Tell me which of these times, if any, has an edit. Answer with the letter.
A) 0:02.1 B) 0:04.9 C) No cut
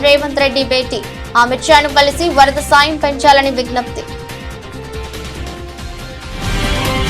B